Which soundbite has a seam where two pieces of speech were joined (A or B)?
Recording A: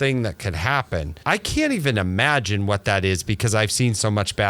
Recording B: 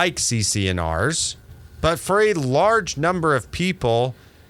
A